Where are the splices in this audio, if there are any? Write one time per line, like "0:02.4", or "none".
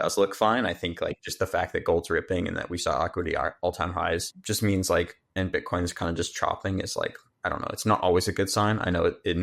0:04.4

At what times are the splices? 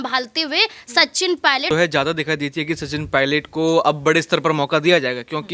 0:01.7

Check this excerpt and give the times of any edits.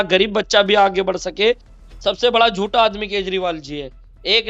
0:01.7

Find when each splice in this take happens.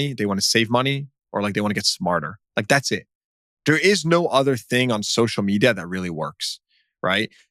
none

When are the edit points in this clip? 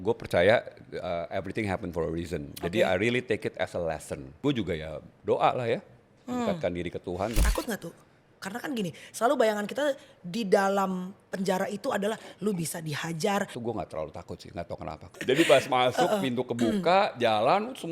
0:04.4
0:07.4
0:13.5
0:15.1

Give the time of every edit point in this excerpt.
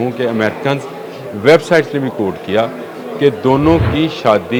none

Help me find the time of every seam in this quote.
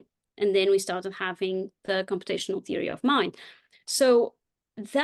none

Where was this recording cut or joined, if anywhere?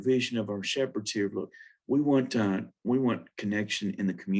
none

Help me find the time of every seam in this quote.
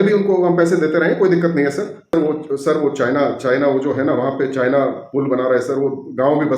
0:02.1

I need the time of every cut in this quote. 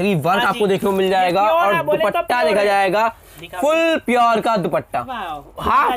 none

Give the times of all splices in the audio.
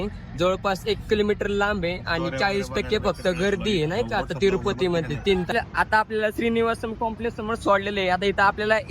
0:05.5

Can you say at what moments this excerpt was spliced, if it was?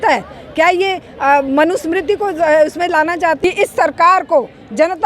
0:03.4

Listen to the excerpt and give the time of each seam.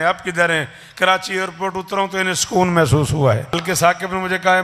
0:03.5

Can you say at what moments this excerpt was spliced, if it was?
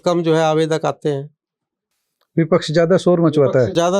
none

